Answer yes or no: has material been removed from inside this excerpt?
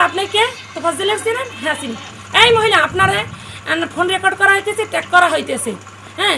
no